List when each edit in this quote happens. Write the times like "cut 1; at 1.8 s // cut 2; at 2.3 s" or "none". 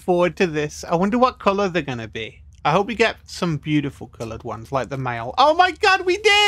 none